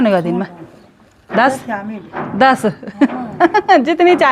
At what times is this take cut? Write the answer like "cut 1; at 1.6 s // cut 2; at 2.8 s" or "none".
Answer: none